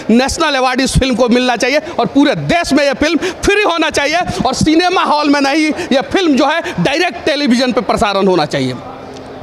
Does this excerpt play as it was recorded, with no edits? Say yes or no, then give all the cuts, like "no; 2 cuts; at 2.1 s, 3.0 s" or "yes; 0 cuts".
yes; 0 cuts